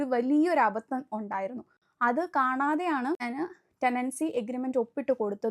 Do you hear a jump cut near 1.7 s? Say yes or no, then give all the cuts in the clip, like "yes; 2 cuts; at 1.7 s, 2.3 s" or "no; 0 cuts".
no; 1 cut; at 3.2 s